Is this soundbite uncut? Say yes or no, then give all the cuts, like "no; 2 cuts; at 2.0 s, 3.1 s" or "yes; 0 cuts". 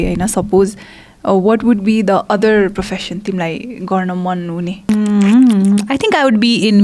no; 1 cut; at 4.9 s